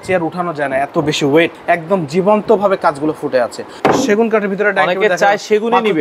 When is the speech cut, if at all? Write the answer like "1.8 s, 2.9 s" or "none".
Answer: 1.6 s, 3.6 s

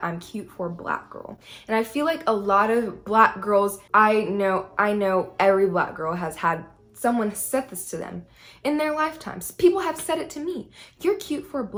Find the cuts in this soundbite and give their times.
none

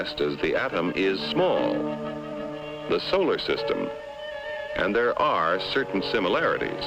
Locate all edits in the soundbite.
5.3 s

